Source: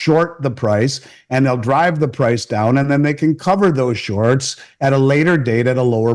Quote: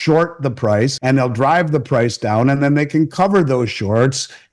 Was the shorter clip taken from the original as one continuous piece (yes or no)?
no